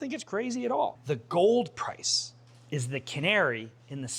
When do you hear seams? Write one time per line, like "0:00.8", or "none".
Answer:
0:01.0